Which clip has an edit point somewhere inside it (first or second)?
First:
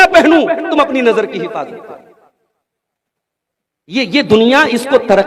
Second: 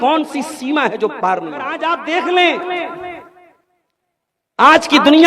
second